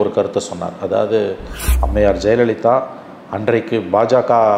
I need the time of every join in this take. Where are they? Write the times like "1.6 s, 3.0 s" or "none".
1.7 s